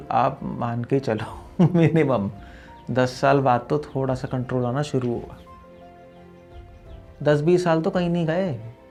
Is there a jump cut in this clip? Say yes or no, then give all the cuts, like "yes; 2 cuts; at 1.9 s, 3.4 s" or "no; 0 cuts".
no; 0 cuts